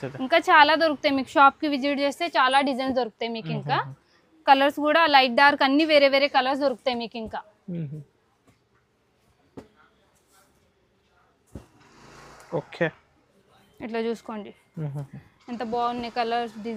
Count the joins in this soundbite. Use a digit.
0